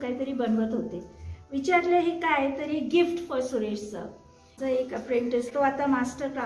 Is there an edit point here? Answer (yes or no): yes